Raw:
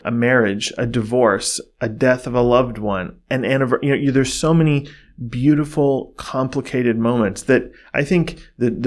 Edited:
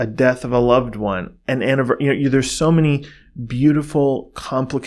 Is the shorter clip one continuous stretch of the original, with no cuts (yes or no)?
yes